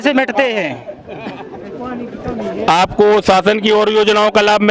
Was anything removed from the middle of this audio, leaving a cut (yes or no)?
no